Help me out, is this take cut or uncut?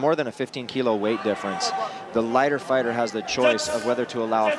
cut